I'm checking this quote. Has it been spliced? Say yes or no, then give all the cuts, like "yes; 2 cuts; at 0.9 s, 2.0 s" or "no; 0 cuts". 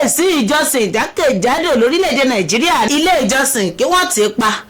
yes; 1 cut; at 2.9 s